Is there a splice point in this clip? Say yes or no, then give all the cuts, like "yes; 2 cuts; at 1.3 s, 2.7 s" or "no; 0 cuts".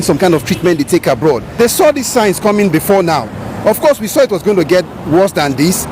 yes; 1 cut; at 1.5 s